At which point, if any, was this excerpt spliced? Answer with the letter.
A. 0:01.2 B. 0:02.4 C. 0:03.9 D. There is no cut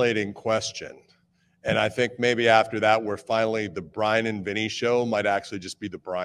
D